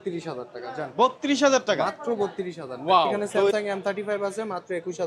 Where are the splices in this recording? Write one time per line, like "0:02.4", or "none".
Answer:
0:03.5